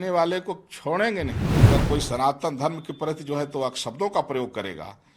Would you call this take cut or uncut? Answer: cut